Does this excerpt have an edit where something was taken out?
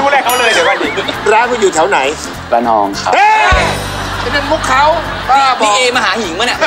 yes; 1 cut; at 1.1 s

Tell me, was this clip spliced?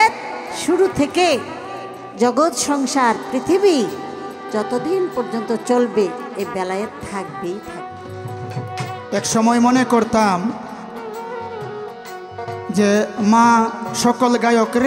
yes; 1 cut; at 9.0 s

